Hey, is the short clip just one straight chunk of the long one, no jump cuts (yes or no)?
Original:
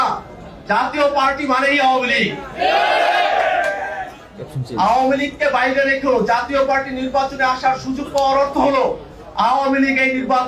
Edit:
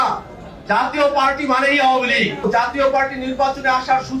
no